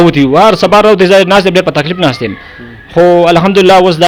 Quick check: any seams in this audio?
no; 0 cuts

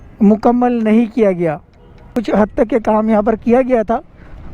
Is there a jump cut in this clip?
yes; 1 cut; at 2.1 s

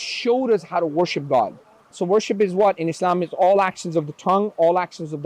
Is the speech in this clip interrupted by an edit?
yes; 1 cut; at 2.0 s

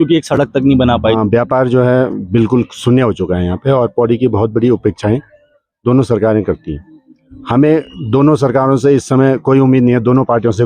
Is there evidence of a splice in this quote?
yes; 1 cut; at 1.1 s

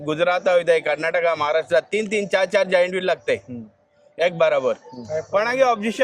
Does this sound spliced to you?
no; 0 cuts

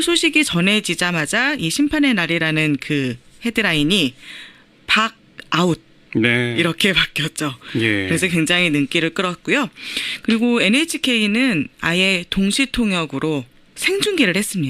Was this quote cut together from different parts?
yes; 1 cut; at 1.5 s

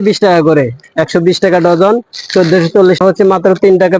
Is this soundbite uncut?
no; 1 cut; at 3.0 s

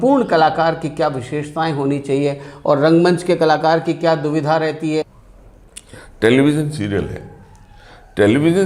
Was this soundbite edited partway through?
yes; 1 cut; at 5.1 s

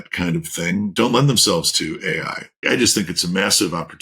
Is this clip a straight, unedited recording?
no; 2 cuts; at 0.9 s, 2.6 s

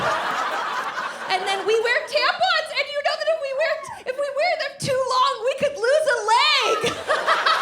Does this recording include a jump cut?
yes; 1 cut; at 1.2 s

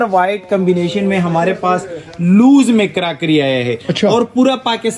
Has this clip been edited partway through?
no; 0 cuts

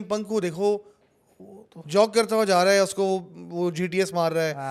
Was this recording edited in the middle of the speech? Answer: no; 0 cuts

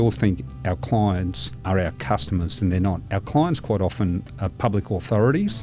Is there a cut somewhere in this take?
yes; 1 cut; at 1.6 s

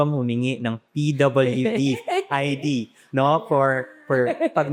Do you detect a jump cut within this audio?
no; 0 cuts

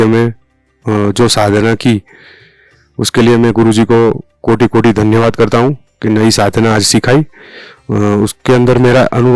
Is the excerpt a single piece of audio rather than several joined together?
yes; 0 cuts

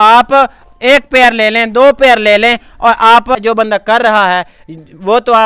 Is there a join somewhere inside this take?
yes; 1 cut; at 3.4 s

